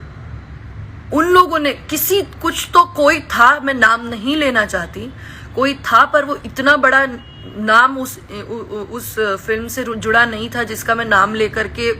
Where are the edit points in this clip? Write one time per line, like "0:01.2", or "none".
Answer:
none

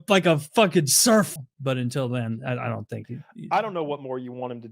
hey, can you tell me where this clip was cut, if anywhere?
0:01.4

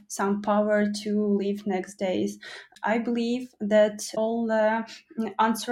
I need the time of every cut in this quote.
0:02.7
0:04.1

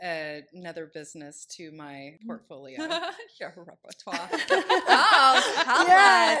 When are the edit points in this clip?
0:02.2

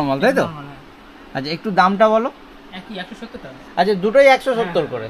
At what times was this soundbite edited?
none

